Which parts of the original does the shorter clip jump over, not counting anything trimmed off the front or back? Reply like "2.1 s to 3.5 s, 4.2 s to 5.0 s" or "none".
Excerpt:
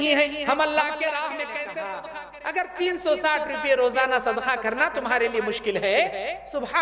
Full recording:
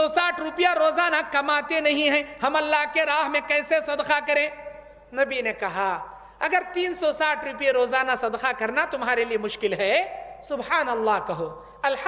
4.0 s to 6.0 s